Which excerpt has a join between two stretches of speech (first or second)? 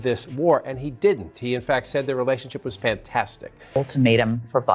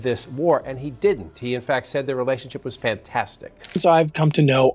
second